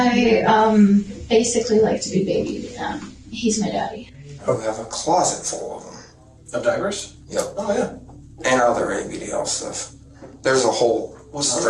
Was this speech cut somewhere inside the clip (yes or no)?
yes